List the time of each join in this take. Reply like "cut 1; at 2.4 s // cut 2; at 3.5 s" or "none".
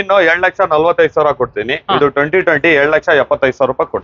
none